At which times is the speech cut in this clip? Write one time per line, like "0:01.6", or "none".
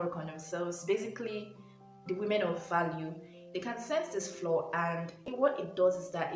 0:05.3